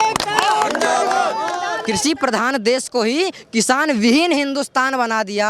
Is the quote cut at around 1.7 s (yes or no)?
yes